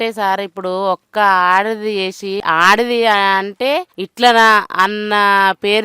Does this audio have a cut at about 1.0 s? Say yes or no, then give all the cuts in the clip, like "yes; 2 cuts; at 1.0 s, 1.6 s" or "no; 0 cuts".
no; 2 cuts; at 2.4 s, 4.0 s